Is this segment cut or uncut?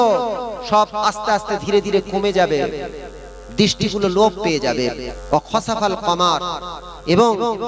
cut